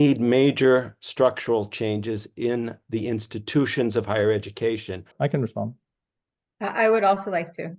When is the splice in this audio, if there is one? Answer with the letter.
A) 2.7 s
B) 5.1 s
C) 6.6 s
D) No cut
B